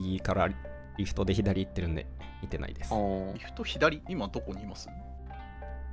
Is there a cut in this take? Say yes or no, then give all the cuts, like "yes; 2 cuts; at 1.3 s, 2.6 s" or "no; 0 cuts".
yes; 2 cuts; at 3.4 s, 4.0 s